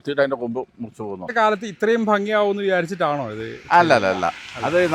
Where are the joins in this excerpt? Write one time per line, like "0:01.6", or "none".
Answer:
0:01.3